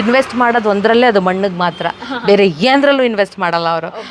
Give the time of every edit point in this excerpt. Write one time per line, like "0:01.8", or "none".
none